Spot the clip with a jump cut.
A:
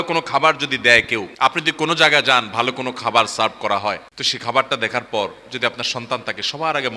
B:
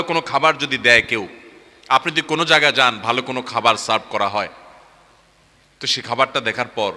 A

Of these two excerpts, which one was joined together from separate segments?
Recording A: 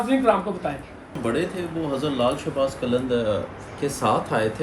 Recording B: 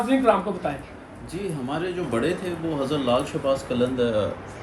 A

